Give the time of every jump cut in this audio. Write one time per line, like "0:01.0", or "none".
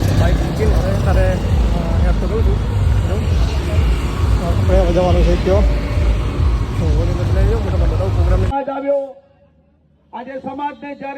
0:08.5

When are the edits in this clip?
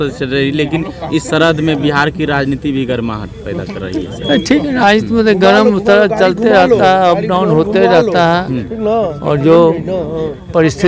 none

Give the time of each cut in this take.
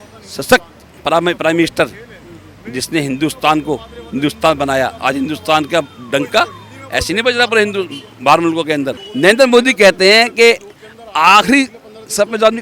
0:09.0

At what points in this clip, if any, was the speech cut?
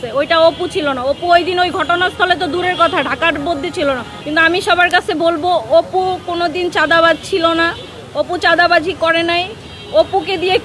0:04.1

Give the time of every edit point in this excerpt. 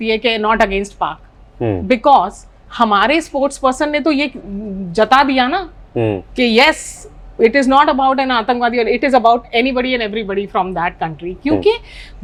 none

